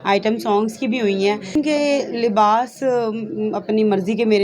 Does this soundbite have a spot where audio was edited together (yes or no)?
yes